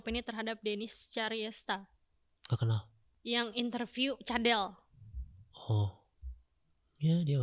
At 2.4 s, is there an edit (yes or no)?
no